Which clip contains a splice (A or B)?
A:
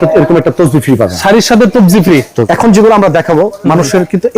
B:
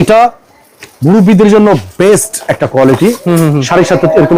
A